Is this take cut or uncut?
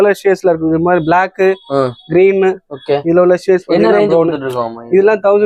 uncut